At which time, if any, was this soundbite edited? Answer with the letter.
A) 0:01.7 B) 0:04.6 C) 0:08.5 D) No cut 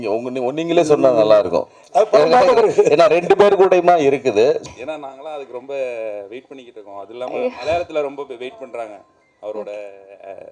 B